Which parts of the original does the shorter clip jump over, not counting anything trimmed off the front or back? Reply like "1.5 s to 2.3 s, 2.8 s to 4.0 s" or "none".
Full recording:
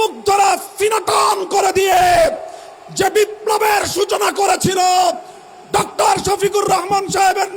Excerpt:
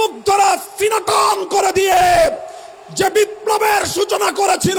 none